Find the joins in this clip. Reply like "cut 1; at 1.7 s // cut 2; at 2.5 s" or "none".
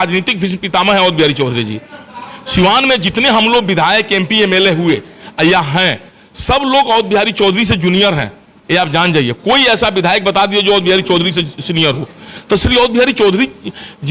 none